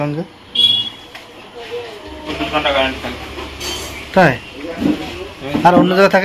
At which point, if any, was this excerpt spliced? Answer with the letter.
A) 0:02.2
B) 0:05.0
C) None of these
A